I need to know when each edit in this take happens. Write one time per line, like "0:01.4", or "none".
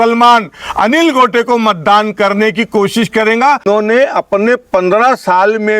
0:03.6